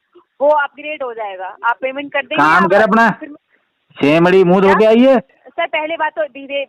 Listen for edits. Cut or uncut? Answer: cut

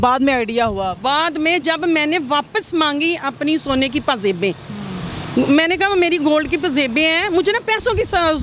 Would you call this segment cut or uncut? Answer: uncut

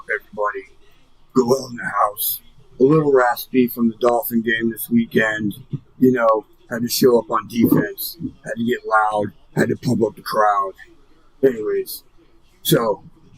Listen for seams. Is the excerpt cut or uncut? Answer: uncut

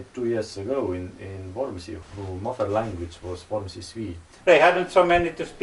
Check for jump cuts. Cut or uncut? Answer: cut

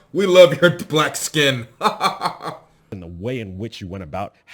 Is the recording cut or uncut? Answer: cut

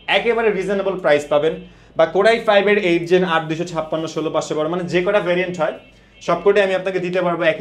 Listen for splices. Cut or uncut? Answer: uncut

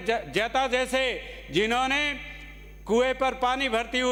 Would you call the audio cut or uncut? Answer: uncut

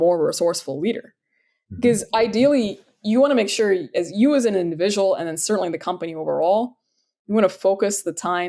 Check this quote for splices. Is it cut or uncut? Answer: uncut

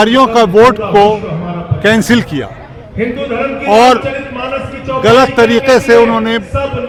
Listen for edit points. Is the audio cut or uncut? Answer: uncut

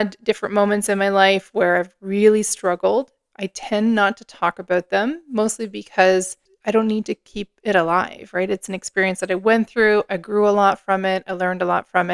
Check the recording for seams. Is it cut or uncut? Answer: cut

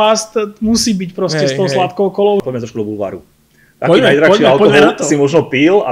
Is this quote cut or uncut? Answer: cut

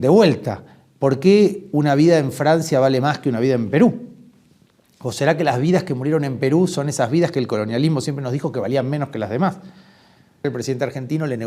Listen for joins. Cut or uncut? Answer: cut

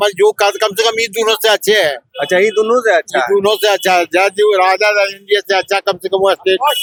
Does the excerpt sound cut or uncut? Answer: uncut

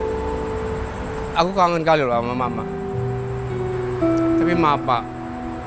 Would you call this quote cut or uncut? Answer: cut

